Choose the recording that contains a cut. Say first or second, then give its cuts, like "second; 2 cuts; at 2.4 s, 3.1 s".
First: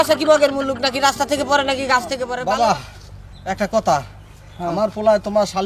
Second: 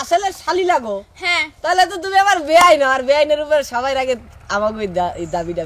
first; 1 cut; at 2.3 s